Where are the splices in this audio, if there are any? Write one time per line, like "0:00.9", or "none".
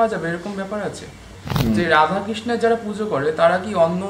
0:01.4